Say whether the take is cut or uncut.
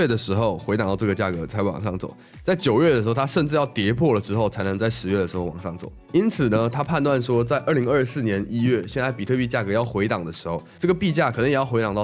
uncut